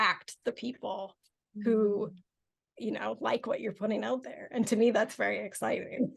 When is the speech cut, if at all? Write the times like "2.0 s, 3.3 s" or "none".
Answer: none